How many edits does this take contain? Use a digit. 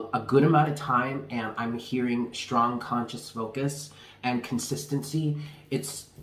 0